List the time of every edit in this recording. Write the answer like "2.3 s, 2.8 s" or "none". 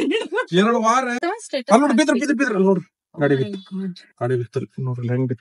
1.2 s